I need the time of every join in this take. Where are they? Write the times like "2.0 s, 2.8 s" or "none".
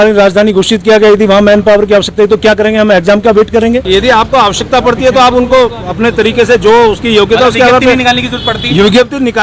3.8 s